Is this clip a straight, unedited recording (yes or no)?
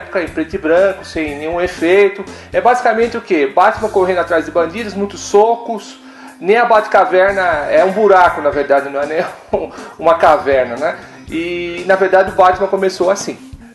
no